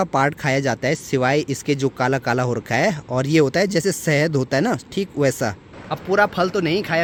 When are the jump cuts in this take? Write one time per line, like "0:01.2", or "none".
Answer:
none